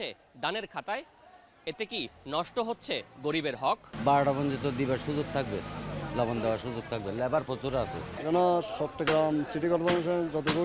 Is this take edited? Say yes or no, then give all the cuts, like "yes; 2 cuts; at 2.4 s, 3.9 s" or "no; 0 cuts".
yes; 2 cuts; at 3.9 s, 8.2 s